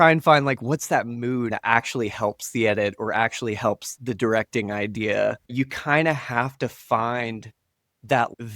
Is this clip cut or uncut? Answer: cut